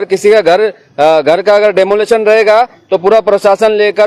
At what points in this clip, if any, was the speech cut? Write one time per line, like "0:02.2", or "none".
none